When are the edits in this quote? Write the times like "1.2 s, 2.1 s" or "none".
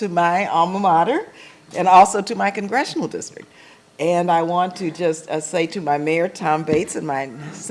3.5 s